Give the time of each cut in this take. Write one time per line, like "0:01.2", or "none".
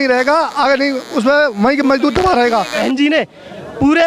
0:02.7

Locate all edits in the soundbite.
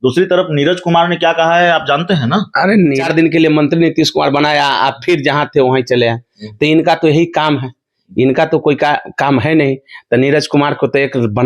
0:03.0

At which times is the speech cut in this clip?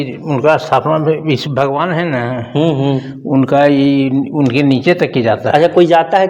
none

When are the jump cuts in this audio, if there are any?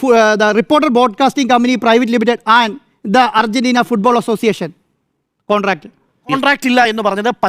0:06.3

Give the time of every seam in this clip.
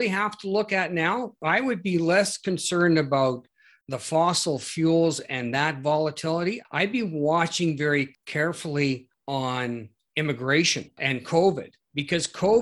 0:01.4
0:06.6
0:08.2
0:09.4
0:11.0

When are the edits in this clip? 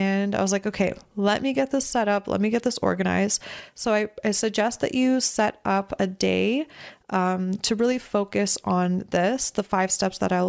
none

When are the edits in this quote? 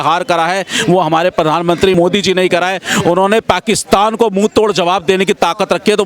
0:01.9

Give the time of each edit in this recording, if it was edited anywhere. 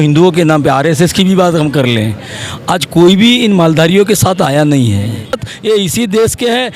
0:05.5

